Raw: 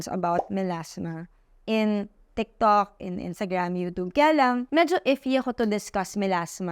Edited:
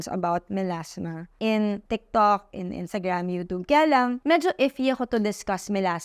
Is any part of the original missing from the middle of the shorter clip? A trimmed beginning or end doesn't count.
yes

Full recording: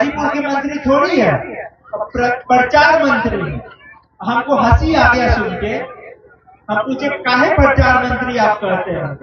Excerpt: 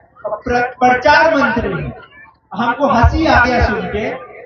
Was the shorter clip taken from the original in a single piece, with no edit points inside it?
yes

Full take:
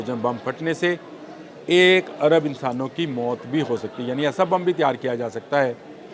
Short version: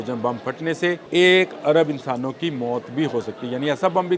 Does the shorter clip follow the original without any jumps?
no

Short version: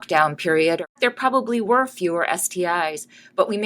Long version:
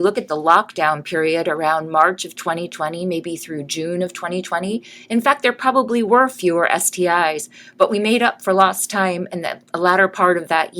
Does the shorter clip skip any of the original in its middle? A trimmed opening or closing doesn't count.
yes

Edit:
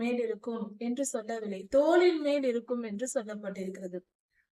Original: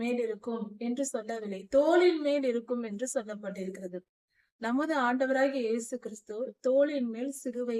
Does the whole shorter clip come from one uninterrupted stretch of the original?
yes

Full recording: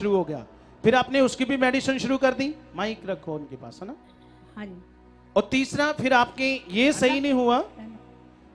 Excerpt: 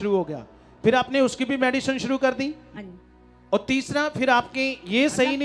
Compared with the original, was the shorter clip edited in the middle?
yes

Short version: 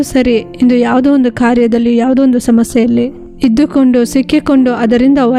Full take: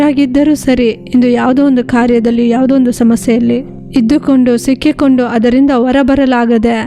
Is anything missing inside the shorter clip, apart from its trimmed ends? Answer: no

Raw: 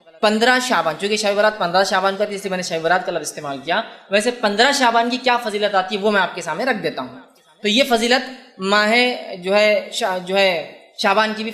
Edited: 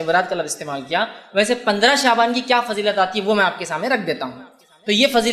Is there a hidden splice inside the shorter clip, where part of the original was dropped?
no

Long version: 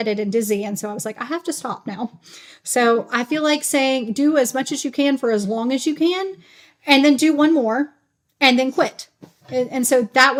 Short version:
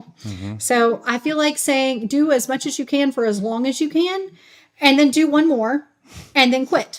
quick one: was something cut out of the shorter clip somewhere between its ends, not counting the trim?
no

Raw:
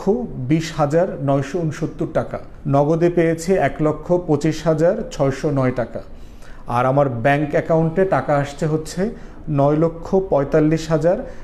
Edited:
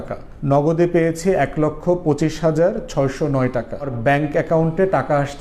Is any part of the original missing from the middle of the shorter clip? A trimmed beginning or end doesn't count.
yes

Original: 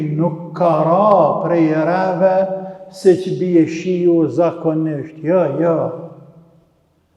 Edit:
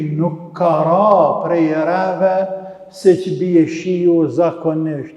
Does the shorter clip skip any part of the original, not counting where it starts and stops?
no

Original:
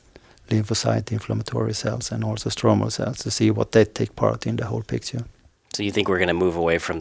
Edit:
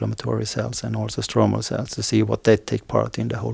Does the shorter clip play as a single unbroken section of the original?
yes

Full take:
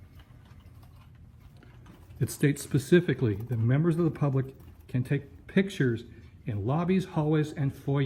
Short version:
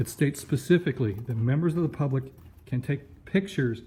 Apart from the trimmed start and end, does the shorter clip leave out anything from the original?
no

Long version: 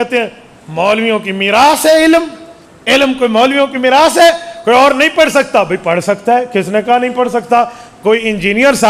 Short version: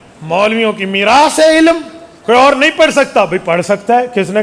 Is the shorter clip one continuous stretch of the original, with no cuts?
no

